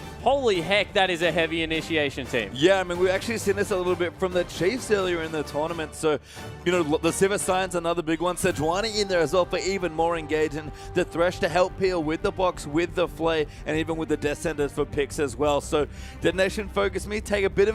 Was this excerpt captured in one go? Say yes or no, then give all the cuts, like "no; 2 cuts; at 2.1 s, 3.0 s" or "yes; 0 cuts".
no; 1 cut; at 8.9 s